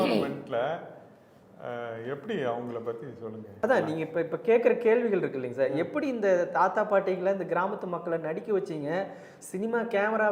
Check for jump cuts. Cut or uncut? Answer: cut